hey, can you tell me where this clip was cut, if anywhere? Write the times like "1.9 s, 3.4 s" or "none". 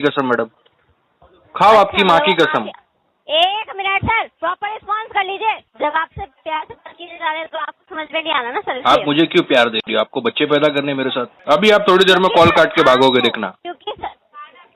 5.7 s, 11.3 s